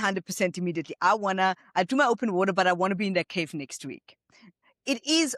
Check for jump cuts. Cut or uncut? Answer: uncut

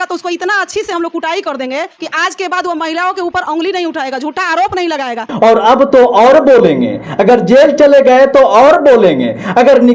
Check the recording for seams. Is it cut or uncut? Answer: cut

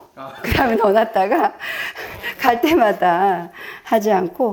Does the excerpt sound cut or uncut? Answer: uncut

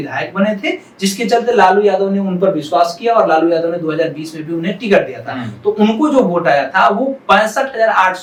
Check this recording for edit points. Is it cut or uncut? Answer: uncut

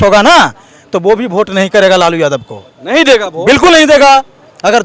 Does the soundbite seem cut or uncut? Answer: uncut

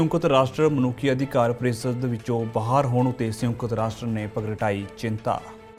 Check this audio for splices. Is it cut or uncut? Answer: uncut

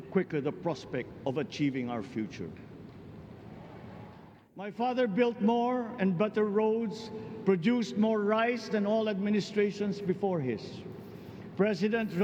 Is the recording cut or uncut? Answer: cut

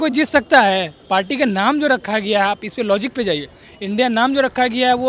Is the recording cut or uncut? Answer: uncut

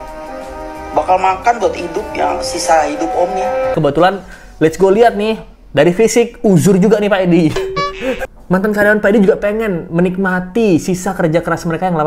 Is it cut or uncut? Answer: cut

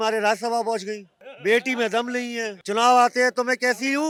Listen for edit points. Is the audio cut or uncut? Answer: uncut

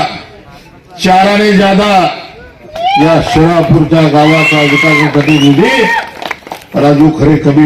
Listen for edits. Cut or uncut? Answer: uncut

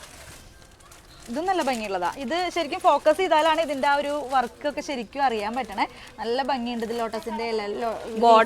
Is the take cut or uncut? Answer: uncut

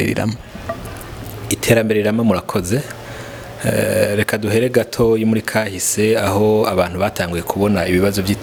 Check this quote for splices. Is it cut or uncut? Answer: uncut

